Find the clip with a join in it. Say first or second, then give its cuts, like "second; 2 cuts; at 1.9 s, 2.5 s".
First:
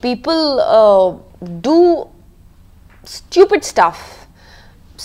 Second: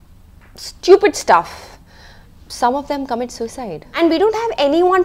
second; 1 cut; at 3.8 s